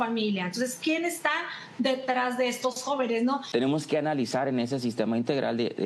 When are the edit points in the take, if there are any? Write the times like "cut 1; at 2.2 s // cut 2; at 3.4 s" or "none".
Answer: cut 1; at 3.4 s